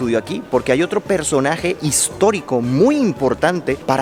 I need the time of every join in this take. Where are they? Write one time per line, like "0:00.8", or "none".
none